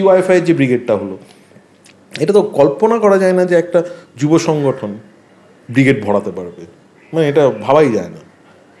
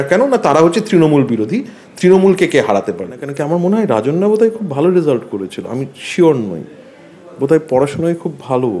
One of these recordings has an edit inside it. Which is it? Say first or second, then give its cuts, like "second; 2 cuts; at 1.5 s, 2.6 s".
second; 1 cut; at 3.3 s